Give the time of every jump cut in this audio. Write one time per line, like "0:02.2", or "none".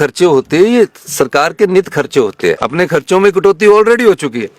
0:02.6